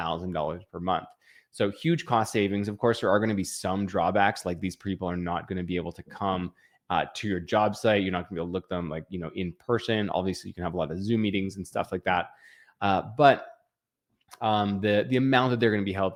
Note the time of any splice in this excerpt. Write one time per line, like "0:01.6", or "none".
none